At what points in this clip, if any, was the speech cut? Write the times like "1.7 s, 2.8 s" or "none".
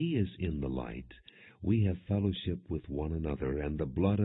none